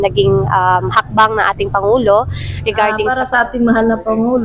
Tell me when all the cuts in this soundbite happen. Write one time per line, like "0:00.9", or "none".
0:03.1